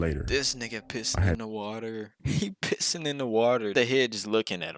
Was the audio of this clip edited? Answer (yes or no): yes